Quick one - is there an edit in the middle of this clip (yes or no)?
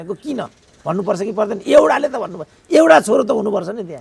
no